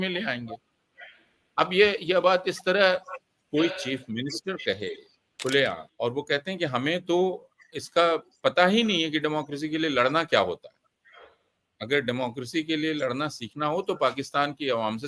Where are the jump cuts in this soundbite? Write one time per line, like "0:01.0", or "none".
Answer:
0:05.9